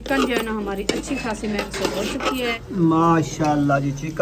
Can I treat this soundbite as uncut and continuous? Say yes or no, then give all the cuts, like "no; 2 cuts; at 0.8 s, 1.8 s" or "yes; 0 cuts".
no; 1 cut; at 2.6 s